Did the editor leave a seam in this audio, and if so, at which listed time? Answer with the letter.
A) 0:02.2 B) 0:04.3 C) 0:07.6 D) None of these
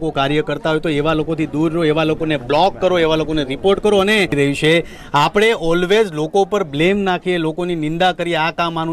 B